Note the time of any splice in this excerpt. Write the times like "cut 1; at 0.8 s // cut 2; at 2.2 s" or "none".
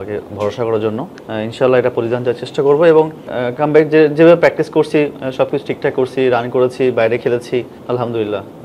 cut 1; at 1.2 s // cut 2; at 3.4 s // cut 3; at 7.8 s